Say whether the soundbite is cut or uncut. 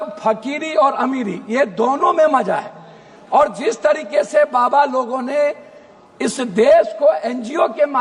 uncut